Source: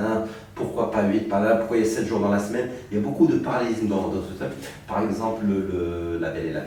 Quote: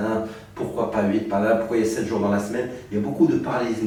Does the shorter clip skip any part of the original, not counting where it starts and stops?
no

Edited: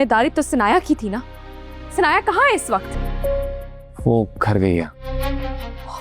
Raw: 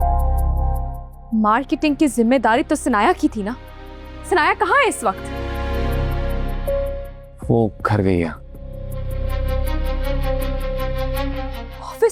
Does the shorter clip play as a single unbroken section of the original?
no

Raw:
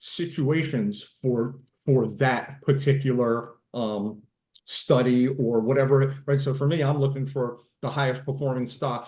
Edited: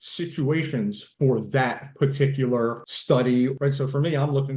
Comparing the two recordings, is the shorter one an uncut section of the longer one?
no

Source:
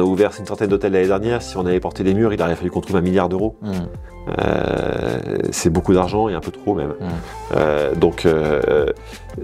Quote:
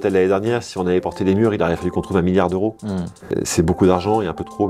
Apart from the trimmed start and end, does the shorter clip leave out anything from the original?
yes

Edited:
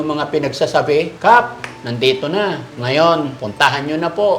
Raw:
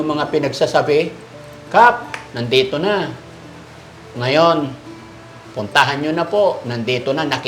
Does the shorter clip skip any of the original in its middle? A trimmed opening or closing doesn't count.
yes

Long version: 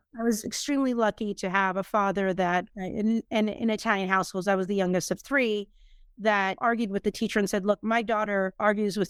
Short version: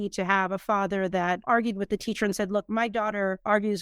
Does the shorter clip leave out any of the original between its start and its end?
yes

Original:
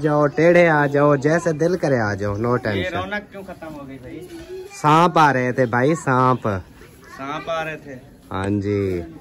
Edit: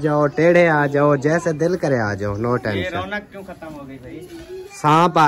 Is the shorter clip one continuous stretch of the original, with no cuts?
yes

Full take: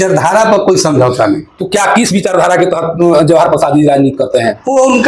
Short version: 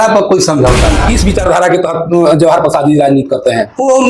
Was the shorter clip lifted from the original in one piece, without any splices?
no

